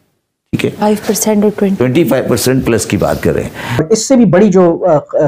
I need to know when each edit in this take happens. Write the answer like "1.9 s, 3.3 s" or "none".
3.8 s